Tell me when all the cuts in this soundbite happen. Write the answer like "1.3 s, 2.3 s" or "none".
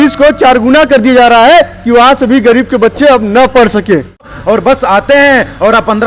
4.3 s